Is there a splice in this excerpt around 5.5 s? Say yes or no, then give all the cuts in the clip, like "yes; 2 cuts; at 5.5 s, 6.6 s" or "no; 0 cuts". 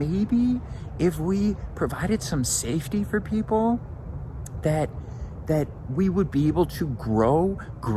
no; 0 cuts